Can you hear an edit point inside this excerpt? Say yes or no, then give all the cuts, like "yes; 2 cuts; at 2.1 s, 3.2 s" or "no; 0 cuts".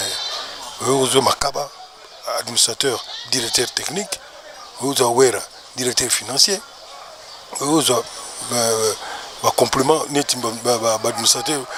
no; 0 cuts